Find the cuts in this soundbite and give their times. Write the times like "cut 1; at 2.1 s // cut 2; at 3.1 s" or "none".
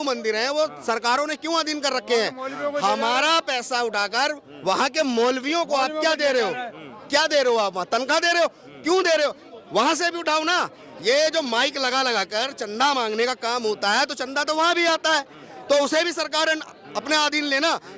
none